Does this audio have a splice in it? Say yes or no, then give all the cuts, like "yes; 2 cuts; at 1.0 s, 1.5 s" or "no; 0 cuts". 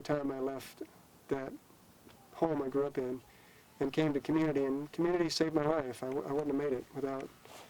no; 0 cuts